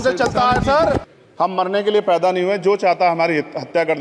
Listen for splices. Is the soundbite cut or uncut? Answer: cut